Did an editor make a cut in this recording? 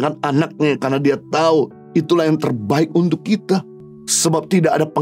no; 0 cuts

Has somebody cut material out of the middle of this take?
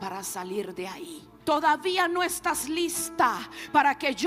yes; 1 cut; at 1.2 s

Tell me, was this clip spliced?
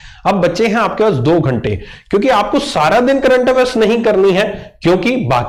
no; 0 cuts

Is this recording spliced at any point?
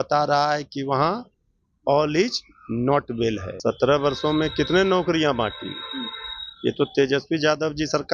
yes; 1 cut; at 3.5 s

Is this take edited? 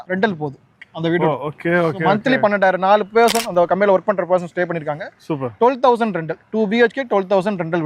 no; 0 cuts

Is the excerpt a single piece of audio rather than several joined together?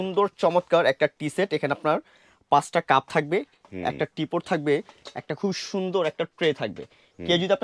yes; 0 cuts

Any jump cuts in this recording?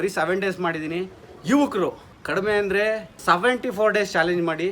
yes; 2 cuts; at 2.1 s, 3.1 s

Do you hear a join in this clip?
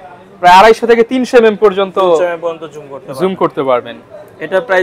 no; 0 cuts

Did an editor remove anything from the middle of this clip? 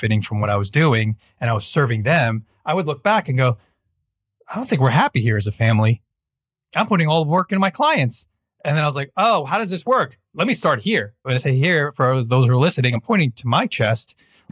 yes; 1 cut; at 11.2 s

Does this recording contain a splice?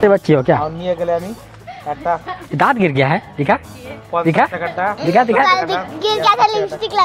no; 0 cuts

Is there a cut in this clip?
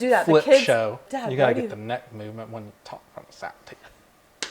yes; 1 cut; at 1.0 s

